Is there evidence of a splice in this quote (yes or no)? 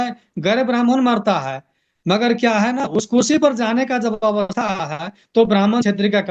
no